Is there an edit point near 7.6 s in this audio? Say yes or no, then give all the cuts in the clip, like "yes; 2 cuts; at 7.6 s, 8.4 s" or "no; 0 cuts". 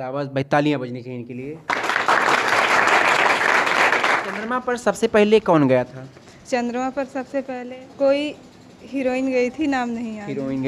yes; 2 cuts; at 4.3 s, 7.6 s